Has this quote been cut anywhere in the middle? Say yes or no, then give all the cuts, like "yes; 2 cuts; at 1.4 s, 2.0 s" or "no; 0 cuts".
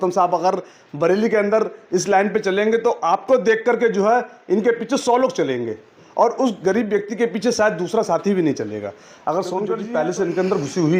yes; 1 cut; at 9.8 s